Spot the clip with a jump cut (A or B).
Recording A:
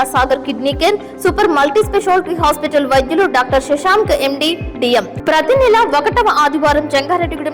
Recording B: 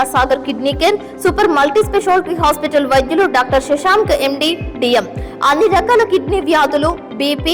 A